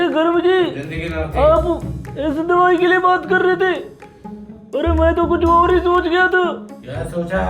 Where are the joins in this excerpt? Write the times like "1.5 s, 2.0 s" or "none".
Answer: none